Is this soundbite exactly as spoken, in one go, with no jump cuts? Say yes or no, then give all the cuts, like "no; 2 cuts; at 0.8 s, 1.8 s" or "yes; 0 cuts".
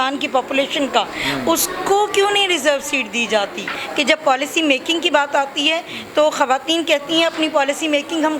no; 1 cut; at 3.8 s